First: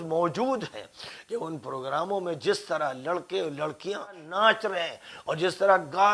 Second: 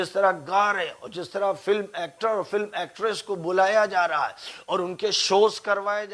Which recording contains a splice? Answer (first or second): first